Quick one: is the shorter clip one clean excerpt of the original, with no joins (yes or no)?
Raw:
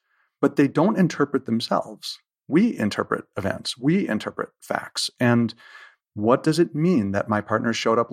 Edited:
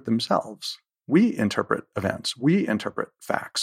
yes